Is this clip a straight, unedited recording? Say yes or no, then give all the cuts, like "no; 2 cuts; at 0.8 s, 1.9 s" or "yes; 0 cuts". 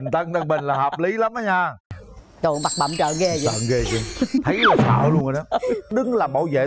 no; 1 cut; at 1.9 s